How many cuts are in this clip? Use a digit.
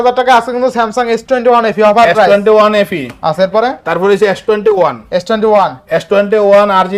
0